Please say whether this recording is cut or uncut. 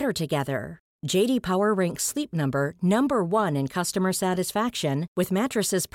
uncut